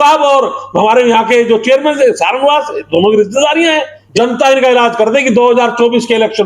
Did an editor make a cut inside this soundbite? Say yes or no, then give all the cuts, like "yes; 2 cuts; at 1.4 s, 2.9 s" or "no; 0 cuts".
yes; 1 cut; at 4.0 s